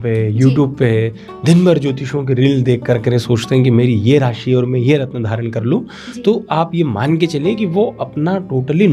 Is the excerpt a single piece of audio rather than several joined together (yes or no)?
yes